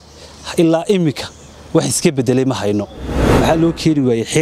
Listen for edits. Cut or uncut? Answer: cut